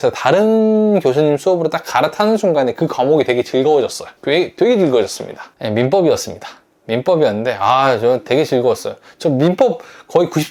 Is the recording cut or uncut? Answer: uncut